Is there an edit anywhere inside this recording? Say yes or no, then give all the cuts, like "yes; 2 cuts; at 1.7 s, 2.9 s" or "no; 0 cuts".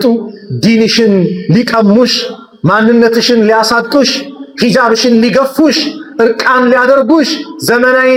no; 0 cuts